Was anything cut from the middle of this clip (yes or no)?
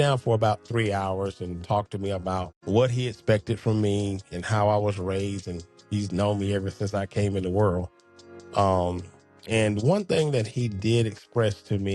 yes